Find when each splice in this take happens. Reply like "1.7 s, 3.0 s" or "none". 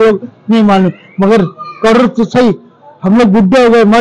none